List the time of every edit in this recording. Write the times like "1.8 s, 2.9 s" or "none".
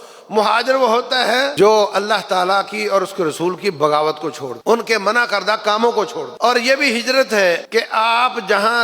1.5 s, 4.5 s, 6.2 s, 7.6 s